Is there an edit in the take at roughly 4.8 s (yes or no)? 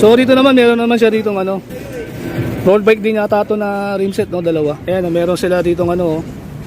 yes